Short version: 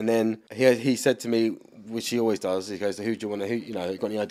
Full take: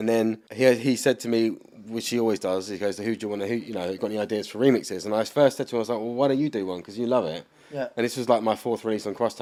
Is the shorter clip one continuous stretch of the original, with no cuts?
yes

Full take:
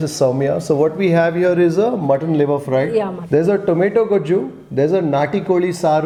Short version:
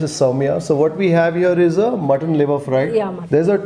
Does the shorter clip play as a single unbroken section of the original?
yes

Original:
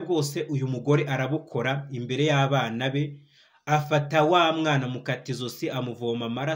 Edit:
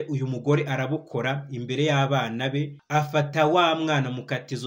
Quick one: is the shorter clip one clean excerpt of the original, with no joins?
no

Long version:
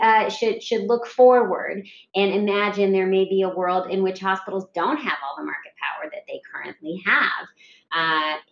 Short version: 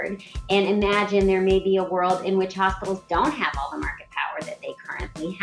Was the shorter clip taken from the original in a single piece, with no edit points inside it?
yes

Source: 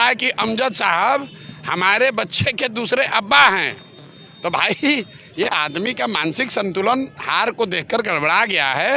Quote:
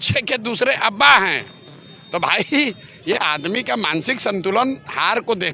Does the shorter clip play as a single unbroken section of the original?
yes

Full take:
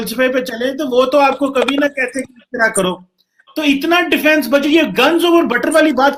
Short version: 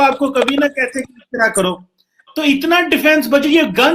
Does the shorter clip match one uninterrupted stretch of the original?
yes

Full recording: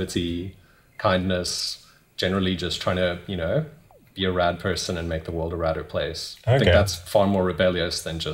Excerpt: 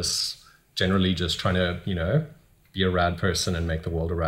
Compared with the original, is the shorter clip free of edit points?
yes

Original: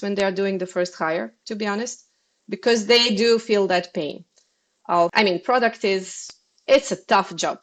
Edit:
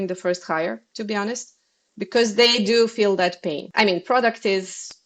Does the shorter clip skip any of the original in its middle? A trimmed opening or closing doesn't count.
yes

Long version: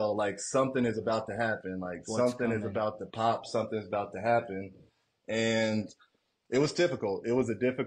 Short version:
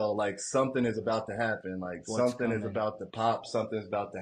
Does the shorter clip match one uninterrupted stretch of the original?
yes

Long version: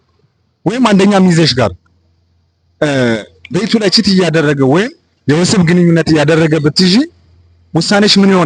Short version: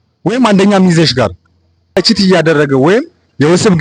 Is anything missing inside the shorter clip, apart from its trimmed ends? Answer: yes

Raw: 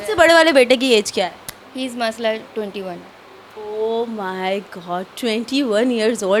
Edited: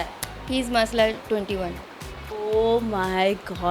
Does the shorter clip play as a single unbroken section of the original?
yes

